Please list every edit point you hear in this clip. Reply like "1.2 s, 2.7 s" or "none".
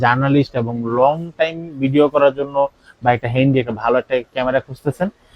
none

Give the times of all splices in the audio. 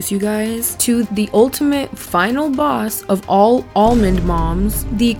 1.1 s

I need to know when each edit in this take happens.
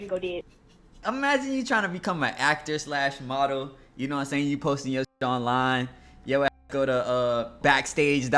0.9 s, 7.6 s

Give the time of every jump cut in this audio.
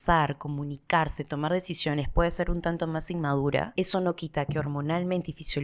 3.7 s

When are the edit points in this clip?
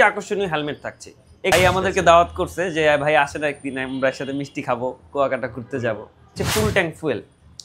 1.5 s, 6.3 s

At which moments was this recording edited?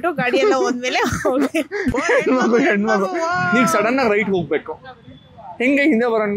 3.4 s

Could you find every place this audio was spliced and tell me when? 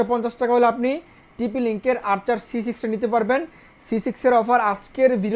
none

